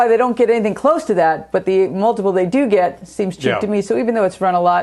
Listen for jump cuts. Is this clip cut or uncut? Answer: uncut